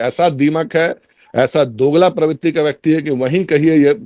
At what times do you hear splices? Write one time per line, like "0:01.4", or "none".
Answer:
none

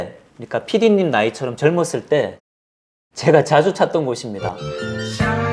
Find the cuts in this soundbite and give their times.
none

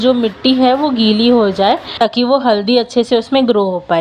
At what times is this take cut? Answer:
0:01.9

